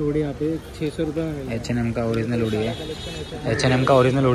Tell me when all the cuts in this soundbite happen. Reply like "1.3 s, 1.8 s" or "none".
none